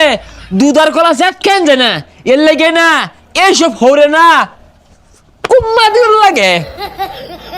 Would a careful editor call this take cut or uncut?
cut